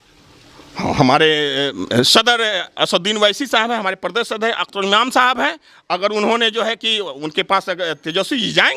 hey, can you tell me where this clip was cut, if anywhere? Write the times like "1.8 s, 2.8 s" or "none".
none